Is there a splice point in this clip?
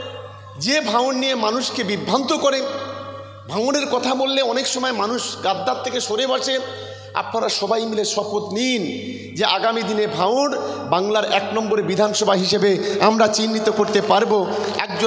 no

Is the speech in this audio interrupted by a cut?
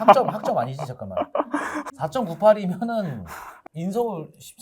yes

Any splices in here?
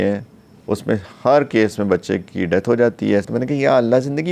yes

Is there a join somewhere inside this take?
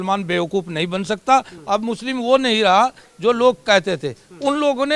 yes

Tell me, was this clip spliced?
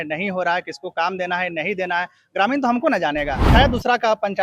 yes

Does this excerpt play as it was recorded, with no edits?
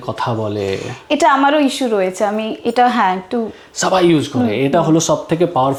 yes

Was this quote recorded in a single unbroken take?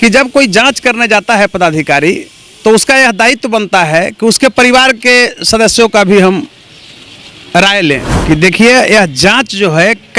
no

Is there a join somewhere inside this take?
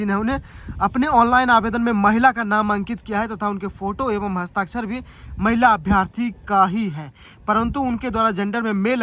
no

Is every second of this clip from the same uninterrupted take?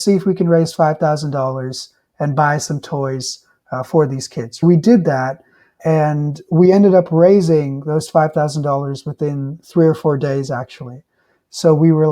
no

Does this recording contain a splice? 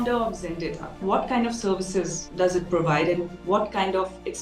yes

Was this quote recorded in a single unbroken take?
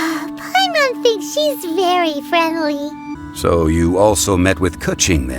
no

